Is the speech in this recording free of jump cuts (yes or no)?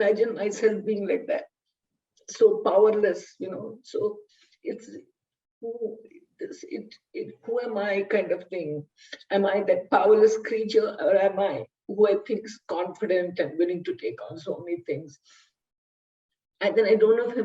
yes